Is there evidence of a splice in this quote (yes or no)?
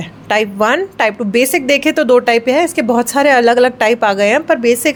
no